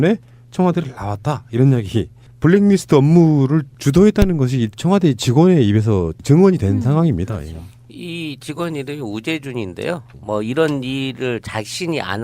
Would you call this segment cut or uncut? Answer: cut